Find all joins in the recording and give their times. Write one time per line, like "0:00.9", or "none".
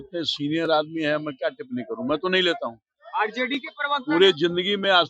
none